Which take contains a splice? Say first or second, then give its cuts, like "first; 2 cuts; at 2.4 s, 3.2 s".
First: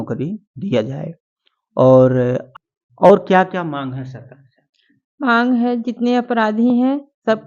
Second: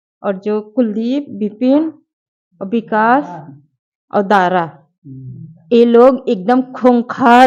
first; 1 cut; at 2.4 s